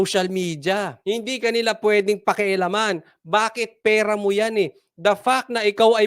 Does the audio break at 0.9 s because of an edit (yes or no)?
yes